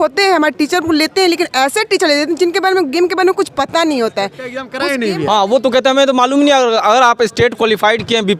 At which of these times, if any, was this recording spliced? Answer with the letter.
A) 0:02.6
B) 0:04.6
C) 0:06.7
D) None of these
B